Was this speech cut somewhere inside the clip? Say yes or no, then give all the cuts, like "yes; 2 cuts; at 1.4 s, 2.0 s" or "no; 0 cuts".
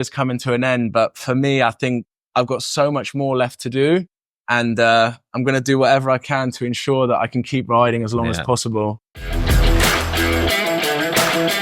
yes; 1 cut; at 9.1 s